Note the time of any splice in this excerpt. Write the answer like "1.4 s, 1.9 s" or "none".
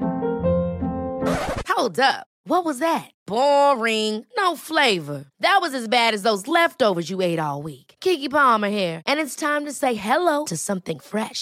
none